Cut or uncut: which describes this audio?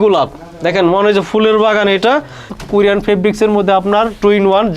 cut